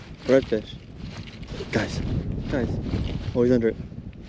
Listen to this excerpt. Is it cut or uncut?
cut